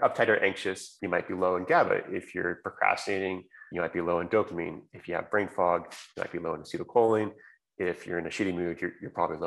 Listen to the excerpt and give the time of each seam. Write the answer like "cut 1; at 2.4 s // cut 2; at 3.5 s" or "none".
cut 1; at 0.9 s // cut 2; at 3.6 s